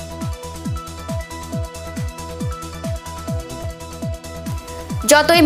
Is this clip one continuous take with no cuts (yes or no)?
yes